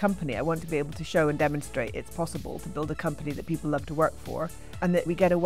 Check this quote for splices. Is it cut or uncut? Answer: uncut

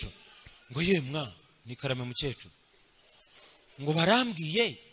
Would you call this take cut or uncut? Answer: uncut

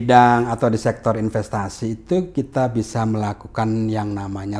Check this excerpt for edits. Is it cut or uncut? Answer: uncut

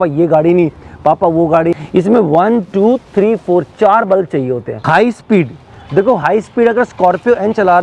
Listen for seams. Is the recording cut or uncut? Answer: cut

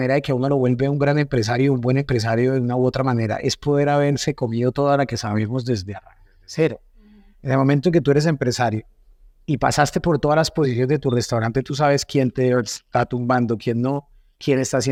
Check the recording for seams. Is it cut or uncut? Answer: uncut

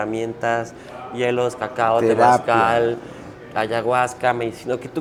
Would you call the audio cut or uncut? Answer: uncut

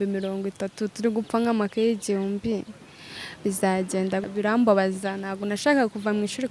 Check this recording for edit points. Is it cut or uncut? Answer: cut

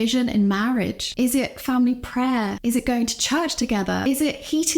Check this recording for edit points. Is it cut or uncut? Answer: cut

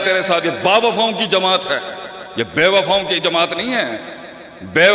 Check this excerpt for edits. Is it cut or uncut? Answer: uncut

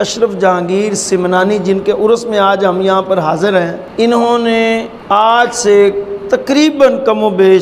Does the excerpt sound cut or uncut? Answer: cut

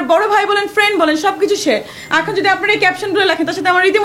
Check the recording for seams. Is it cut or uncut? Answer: uncut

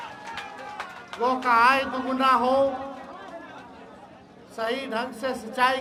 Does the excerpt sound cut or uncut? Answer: uncut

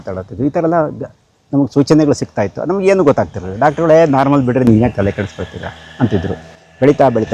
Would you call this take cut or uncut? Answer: uncut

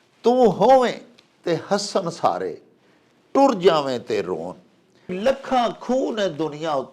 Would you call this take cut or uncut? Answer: cut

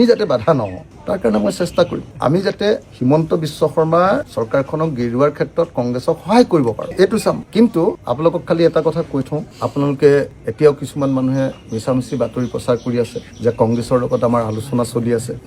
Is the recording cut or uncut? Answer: uncut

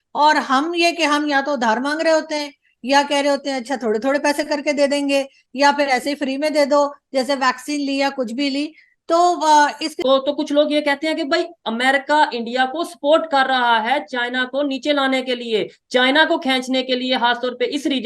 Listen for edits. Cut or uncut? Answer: cut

